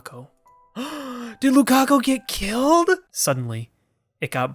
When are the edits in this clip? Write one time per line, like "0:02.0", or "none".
0:03.1